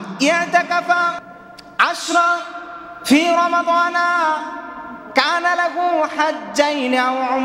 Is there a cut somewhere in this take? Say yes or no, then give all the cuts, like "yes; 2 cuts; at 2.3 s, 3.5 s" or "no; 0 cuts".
yes; 1 cut; at 1.3 s